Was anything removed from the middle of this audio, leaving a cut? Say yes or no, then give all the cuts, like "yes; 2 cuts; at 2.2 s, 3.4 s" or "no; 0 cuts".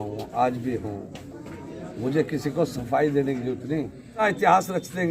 yes; 1 cut; at 4.2 s